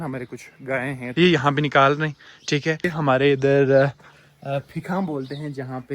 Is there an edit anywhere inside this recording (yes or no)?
yes